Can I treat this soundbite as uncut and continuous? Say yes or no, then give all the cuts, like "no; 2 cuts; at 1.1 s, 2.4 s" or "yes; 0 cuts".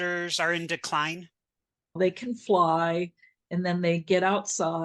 no; 1 cut; at 1.8 s